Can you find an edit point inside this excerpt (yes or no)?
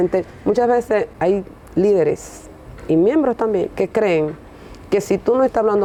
no